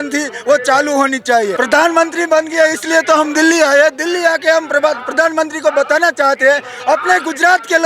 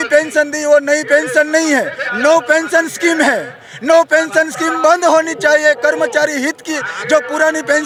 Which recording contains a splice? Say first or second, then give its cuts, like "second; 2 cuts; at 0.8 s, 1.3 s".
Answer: first; 1 cut; at 1.5 s